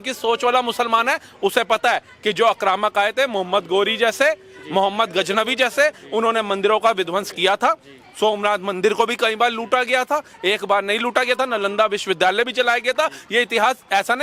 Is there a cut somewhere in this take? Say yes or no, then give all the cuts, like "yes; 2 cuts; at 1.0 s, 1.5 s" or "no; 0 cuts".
no; 0 cuts